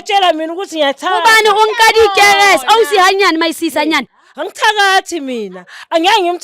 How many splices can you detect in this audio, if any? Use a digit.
1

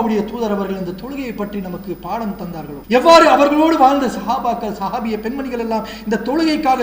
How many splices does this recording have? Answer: 1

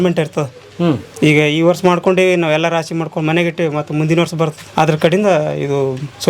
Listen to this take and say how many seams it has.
1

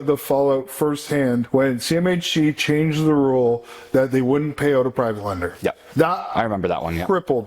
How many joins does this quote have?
2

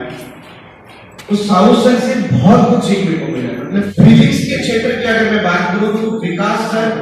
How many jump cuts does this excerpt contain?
1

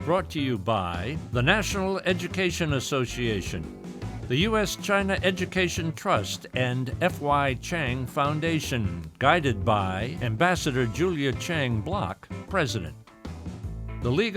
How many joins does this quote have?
1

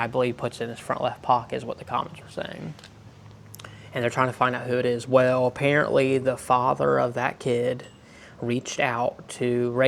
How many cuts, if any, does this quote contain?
0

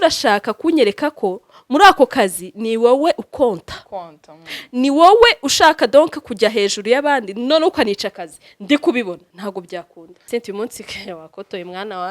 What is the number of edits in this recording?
1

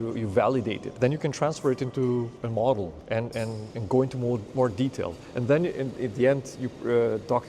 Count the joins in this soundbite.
3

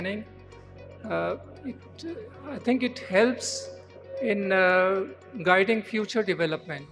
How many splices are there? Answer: 0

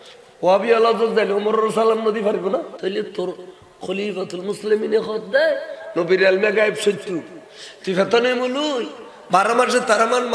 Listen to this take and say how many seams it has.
1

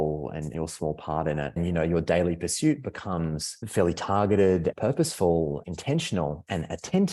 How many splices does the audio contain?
4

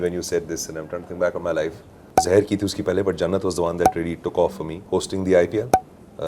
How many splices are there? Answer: 2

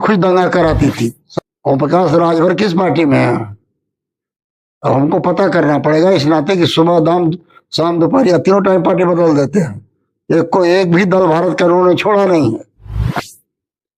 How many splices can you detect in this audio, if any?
2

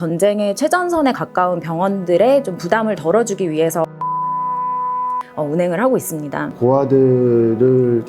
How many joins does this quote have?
1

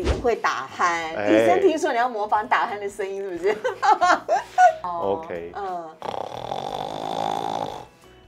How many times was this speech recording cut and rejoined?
1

